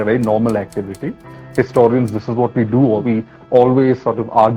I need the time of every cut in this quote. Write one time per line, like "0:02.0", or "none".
0:03.0